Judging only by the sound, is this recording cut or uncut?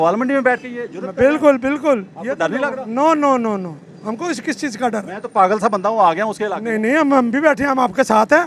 uncut